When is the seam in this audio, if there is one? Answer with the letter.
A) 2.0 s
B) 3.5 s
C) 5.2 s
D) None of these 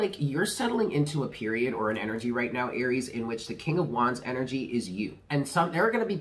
C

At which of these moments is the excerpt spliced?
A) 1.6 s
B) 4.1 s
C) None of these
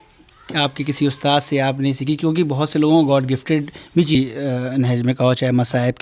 B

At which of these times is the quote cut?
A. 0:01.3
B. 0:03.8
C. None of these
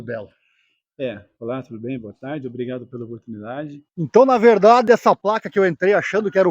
B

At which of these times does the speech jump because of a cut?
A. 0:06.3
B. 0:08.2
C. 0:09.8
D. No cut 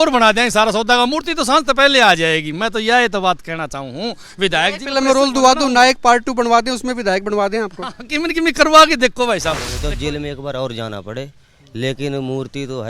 C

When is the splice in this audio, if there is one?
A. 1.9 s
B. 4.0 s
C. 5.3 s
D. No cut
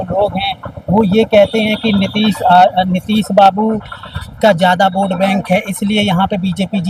D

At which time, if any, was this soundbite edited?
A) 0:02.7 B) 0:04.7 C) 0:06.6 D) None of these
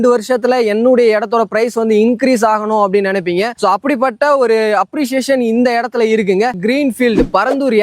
C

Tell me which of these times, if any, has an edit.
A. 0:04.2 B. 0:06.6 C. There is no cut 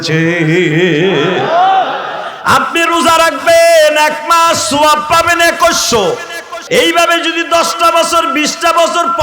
B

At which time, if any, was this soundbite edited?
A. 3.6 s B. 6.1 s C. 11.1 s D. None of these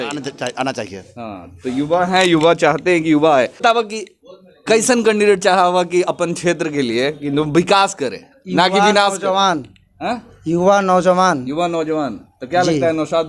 A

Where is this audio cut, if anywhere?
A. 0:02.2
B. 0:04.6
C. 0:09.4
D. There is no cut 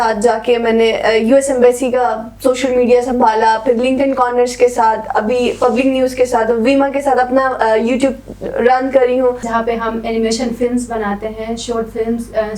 C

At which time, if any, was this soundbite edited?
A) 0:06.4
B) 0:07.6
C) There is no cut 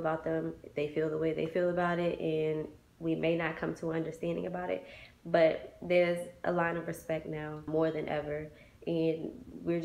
B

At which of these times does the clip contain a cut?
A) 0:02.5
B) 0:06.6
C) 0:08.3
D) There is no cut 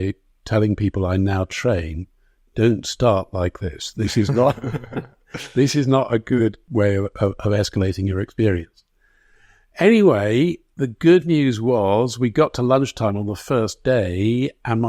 B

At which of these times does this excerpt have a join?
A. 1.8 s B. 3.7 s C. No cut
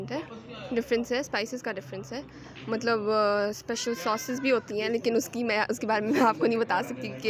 C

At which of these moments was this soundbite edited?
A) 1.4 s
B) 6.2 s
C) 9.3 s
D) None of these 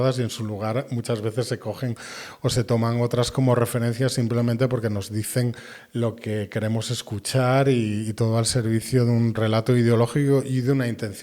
C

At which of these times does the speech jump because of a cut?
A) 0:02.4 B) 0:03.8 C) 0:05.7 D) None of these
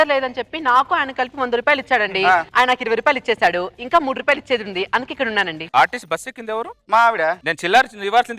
C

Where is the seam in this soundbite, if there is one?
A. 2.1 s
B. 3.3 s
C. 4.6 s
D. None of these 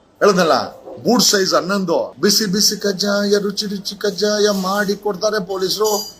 A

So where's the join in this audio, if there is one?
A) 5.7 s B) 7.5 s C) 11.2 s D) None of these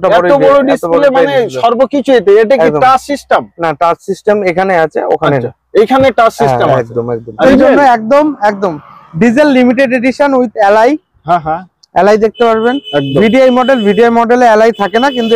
B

